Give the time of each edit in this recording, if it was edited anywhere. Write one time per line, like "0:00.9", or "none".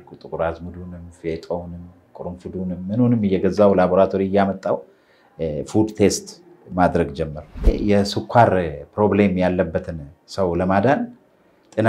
0:07.7